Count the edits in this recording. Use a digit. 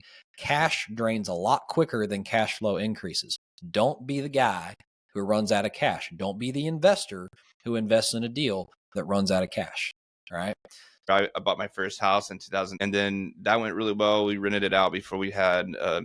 2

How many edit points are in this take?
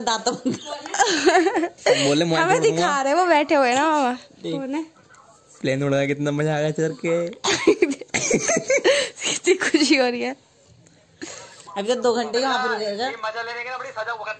0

